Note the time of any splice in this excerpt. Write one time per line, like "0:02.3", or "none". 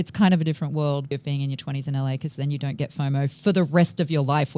0:01.1